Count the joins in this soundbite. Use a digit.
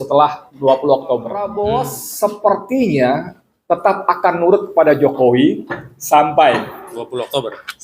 1